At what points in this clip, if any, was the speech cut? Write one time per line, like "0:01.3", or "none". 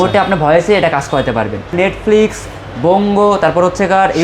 0:01.7